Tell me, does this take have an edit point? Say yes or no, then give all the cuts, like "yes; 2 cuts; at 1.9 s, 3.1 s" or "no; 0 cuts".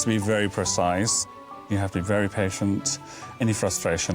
yes; 1 cut; at 1.3 s